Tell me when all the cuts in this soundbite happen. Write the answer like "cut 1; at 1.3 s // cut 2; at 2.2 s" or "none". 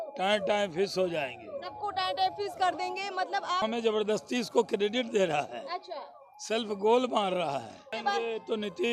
cut 1; at 3.6 s // cut 2; at 8.0 s